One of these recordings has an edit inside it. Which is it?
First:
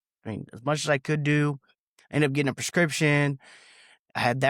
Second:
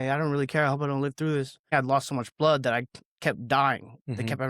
second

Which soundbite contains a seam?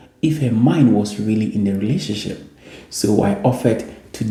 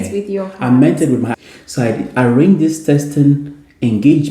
second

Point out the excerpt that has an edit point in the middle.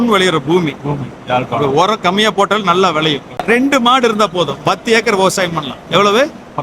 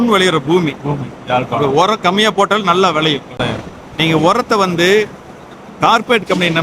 first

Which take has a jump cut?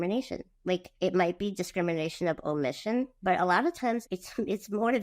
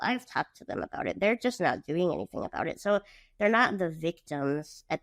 first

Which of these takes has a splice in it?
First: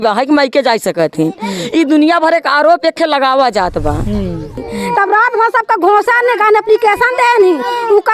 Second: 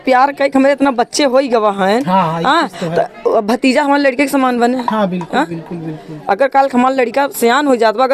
first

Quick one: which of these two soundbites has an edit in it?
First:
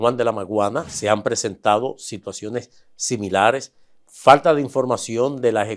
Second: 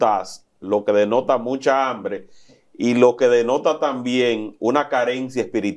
first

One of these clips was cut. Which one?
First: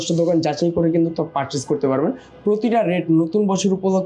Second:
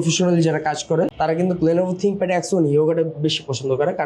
second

